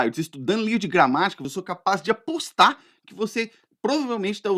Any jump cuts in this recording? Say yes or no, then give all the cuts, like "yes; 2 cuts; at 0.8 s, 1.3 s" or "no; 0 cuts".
yes; 1 cut; at 1.5 s